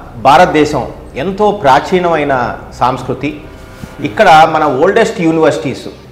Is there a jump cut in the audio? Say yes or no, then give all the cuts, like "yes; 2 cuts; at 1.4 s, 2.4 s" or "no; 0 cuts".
no; 0 cuts